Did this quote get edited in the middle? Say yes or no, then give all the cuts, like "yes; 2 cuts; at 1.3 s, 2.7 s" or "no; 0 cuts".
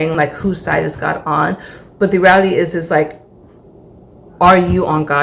no; 0 cuts